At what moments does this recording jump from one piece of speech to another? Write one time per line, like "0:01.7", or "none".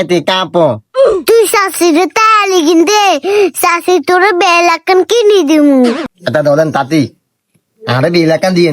0:06.1